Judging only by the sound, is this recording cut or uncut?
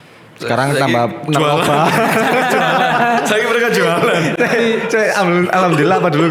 uncut